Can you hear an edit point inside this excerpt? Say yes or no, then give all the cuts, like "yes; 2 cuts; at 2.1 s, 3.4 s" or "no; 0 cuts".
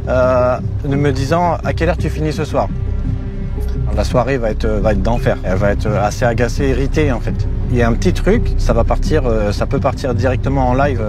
no; 0 cuts